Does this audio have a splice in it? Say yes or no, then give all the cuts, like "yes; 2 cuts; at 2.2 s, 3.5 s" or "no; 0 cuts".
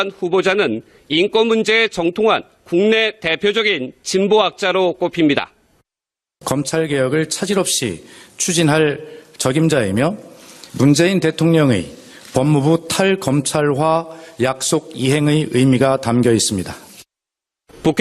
yes; 1 cut; at 7.9 s